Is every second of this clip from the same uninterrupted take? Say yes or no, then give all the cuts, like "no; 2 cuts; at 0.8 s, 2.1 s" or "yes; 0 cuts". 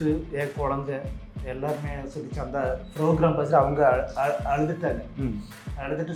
yes; 0 cuts